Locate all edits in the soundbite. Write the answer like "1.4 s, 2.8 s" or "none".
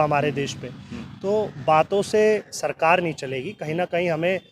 none